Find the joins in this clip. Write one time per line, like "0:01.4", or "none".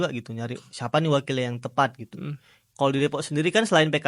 none